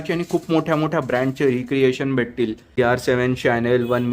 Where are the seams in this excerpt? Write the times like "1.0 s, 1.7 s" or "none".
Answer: 2.7 s